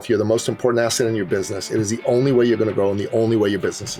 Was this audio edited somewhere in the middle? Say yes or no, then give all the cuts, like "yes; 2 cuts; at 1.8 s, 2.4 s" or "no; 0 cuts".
no; 0 cuts